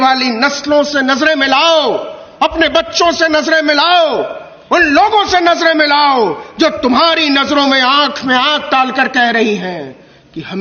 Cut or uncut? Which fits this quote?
uncut